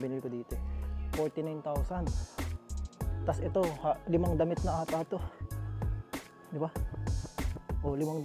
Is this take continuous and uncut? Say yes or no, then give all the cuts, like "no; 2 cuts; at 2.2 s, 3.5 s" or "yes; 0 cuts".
yes; 0 cuts